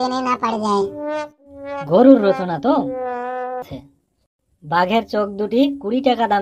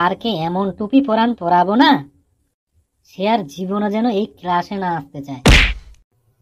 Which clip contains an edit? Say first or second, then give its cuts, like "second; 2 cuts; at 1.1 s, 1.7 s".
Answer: first; 1 cut; at 3.6 s